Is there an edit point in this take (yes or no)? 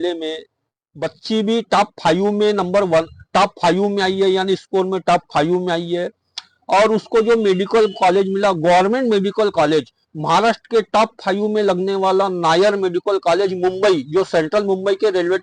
no